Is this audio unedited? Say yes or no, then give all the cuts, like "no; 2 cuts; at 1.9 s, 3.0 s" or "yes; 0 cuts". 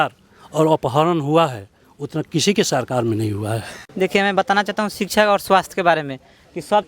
no; 1 cut; at 3.8 s